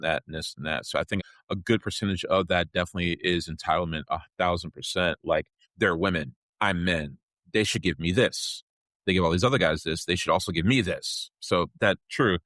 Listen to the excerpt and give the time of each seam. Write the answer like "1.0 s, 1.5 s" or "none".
1.2 s

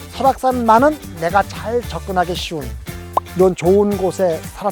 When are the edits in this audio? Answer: none

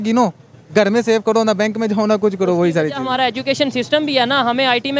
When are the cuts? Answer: none

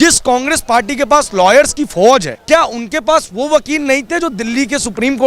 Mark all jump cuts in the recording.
2.3 s

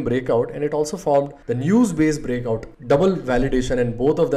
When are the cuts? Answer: 2.7 s

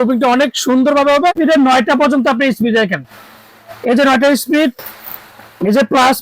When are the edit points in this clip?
1.4 s

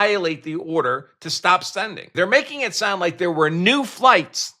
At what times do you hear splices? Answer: 2.1 s

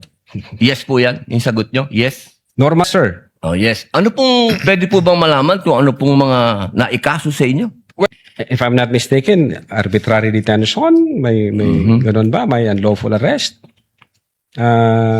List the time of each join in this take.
2.8 s, 8.1 s

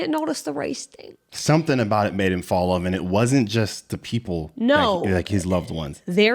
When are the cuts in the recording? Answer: none

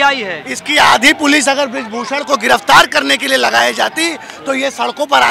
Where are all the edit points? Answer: none

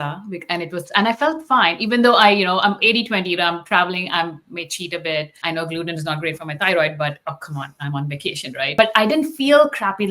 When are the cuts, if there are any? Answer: 5.3 s, 8.8 s

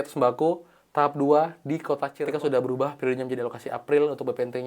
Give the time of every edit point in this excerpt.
2.1 s

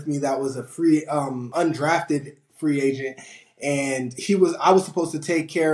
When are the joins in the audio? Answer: 1.4 s

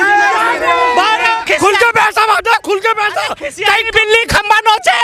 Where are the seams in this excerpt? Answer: 1.4 s

